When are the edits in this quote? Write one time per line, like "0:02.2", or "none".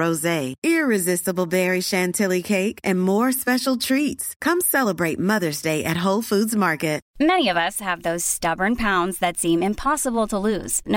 0:07.0